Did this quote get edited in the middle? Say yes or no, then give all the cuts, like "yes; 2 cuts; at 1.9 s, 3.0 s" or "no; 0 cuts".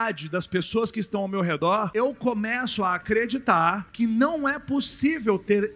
yes; 2 cuts; at 1.6 s, 3.9 s